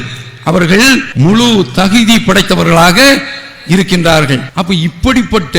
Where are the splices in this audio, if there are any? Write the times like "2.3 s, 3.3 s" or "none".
1.1 s, 4.5 s